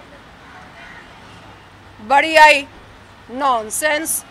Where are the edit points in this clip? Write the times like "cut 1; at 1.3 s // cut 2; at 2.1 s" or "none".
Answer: none